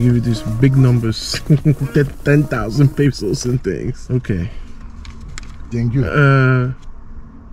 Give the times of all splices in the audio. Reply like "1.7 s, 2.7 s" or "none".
4.0 s